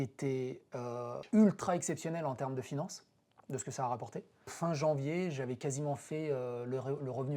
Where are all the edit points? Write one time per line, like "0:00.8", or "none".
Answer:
0:01.2
0:04.5